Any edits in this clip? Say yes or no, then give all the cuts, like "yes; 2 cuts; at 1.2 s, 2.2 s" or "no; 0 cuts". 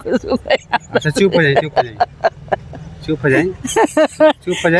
no; 0 cuts